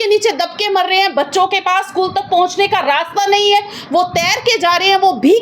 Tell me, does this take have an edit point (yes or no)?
no